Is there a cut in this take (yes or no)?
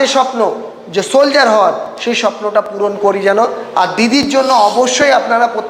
no